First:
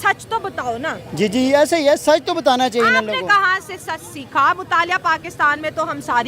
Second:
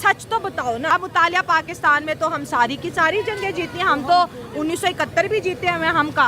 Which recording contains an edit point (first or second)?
second